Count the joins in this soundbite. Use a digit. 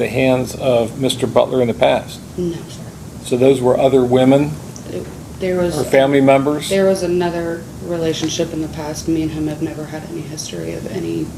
0